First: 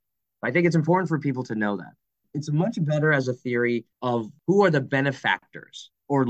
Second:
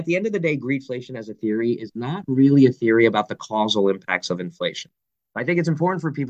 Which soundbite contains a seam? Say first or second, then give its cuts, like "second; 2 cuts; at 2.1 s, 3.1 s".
first; 2 cuts; at 2.3 s, 4.3 s